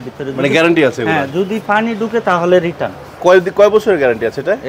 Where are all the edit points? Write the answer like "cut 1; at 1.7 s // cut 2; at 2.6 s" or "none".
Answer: none